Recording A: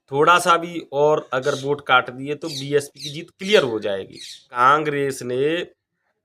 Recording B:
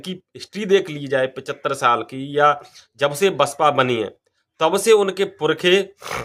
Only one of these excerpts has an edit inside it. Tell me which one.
A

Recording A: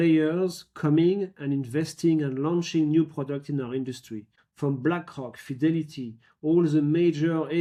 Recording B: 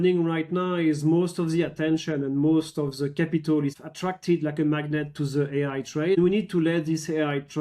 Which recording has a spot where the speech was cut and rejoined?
B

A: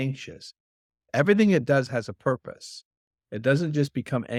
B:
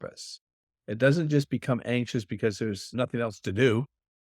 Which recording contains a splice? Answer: B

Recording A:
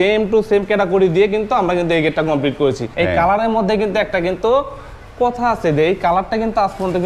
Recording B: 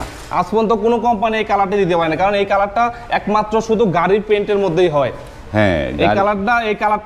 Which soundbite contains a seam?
A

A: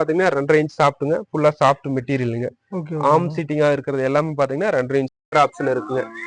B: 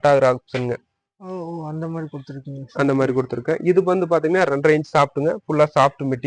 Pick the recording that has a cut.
A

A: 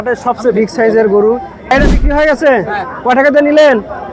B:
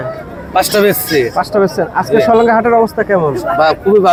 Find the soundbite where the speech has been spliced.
A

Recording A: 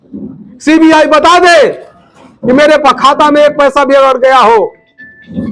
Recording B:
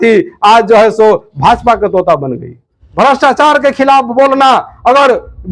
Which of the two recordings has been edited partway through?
B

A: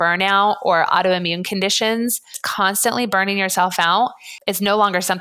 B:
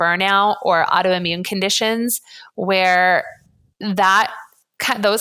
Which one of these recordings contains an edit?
A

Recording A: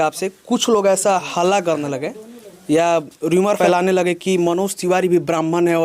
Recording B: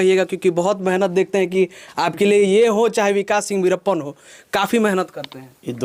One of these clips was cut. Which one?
A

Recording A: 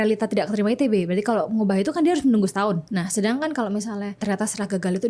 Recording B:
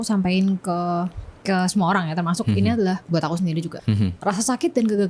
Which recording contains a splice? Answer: A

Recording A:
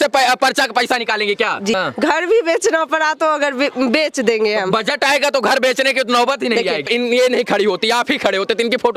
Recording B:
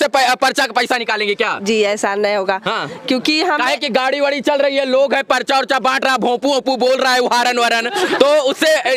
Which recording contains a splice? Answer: A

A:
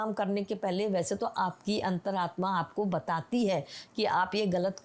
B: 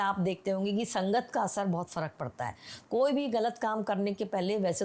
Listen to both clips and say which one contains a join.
B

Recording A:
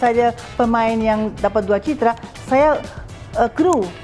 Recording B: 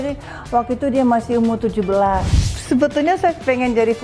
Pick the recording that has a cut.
B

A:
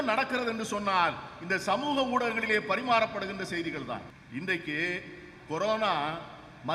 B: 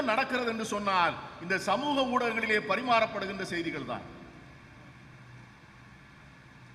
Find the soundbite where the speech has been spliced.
A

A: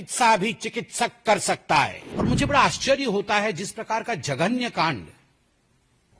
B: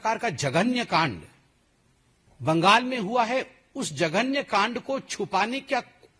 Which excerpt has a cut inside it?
A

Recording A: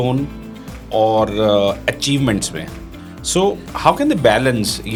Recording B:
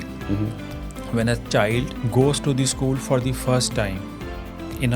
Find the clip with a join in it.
B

